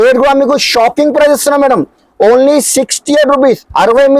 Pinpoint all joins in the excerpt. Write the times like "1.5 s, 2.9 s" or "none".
none